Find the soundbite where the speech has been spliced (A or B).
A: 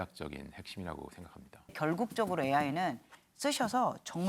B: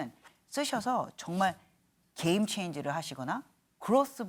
A